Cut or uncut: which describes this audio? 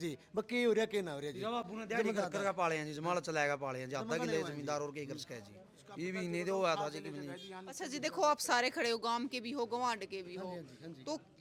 uncut